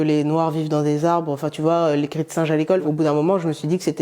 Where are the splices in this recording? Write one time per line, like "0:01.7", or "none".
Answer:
0:02.8

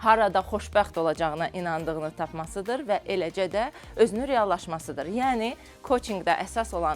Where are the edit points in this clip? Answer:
none

